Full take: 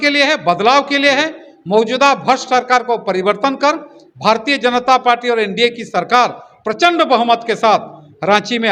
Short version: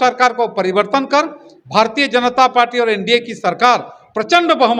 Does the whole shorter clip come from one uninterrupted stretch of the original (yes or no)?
yes